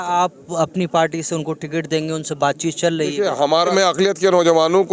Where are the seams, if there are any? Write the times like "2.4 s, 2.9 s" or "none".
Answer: 3.7 s

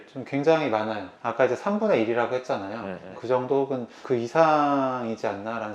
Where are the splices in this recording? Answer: 3.9 s

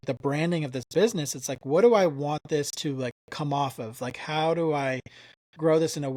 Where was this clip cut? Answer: none

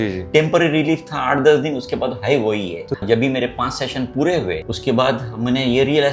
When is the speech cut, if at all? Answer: 3.0 s, 4.7 s

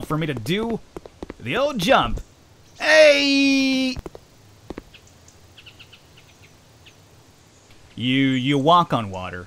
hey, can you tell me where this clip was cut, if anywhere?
7.7 s

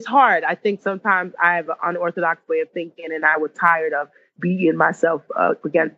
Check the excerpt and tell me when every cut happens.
none

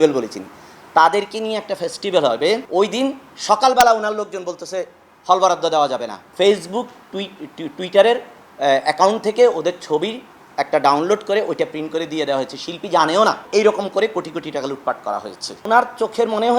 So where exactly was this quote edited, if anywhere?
2.6 s, 6.2 s, 13.4 s, 15.5 s

